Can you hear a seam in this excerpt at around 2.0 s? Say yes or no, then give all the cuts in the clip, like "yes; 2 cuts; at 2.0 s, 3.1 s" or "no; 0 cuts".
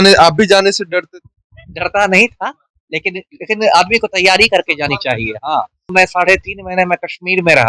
no; 1 cut; at 5.9 s